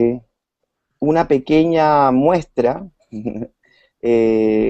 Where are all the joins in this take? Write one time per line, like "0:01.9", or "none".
0:01.3